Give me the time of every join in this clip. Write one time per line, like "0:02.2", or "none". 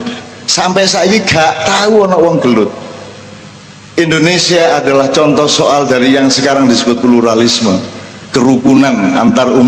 none